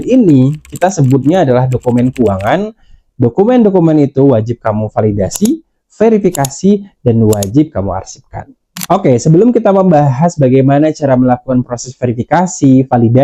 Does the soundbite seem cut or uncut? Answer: uncut